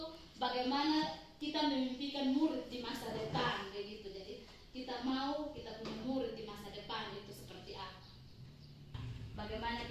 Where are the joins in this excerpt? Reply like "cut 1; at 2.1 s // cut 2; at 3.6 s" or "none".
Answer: cut 1; at 8.9 s